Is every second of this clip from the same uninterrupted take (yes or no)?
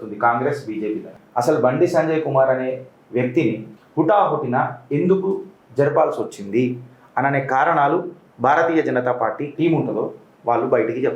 no